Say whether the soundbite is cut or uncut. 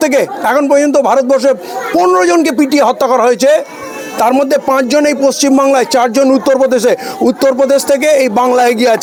uncut